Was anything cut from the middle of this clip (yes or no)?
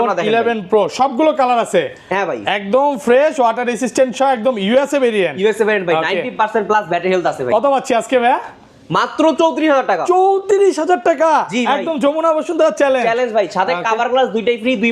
no